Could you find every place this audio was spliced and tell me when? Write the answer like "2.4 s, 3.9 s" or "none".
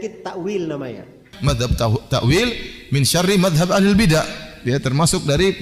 1.3 s